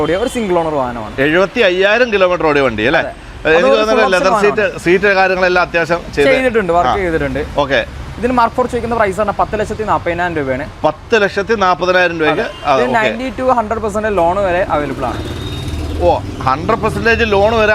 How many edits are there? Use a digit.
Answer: 0